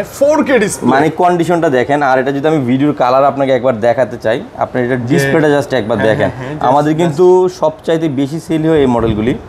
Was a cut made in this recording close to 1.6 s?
no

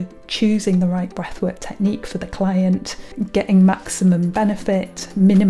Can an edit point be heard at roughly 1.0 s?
no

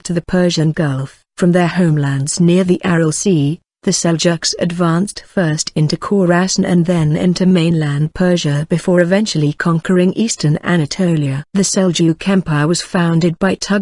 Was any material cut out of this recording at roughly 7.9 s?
yes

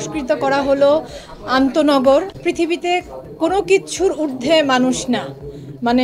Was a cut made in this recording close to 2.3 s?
yes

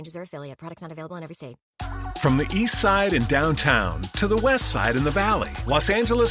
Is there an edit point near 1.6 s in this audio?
yes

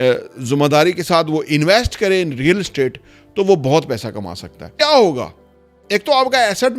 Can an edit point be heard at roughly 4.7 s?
yes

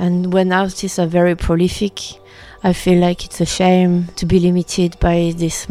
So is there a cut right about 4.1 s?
yes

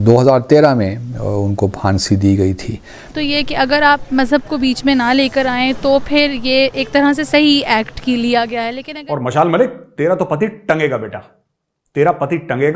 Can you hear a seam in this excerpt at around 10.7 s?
no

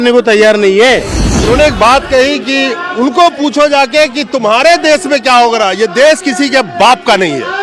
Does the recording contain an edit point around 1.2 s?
yes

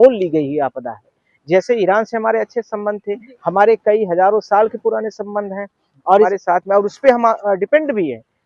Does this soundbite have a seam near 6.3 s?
yes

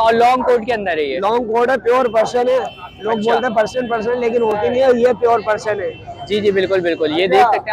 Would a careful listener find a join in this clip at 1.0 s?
no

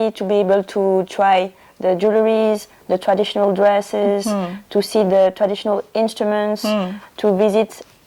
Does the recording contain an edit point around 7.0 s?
no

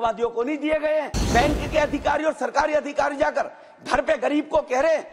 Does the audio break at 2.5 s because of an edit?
no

